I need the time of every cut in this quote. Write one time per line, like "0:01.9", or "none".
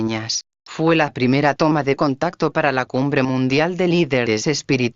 none